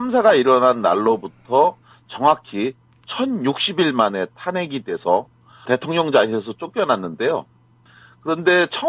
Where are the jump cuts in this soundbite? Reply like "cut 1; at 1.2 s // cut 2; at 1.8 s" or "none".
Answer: cut 1; at 1.8 s